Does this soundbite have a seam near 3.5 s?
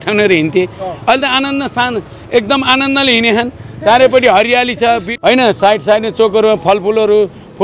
no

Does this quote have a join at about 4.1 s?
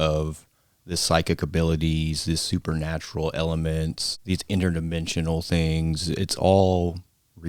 yes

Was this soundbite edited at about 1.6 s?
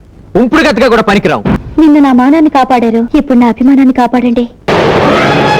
yes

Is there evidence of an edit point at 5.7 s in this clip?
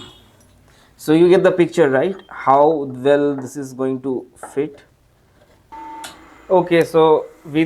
yes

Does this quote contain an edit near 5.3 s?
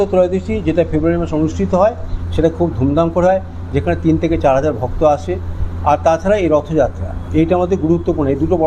no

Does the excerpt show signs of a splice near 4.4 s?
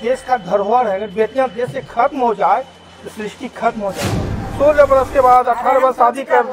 yes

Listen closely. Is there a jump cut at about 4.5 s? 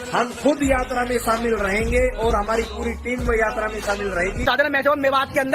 yes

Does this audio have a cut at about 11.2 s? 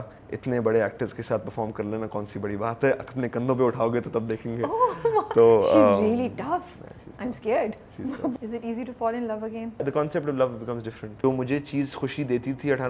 yes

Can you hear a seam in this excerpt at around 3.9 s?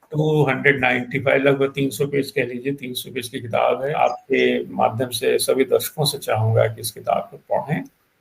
yes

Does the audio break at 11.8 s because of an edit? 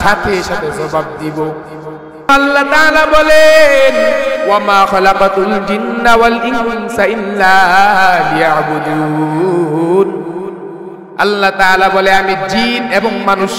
no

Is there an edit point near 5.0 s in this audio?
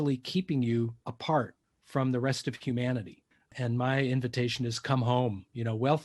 no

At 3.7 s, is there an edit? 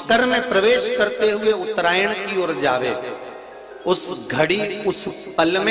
no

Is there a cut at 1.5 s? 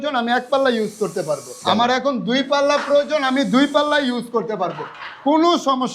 yes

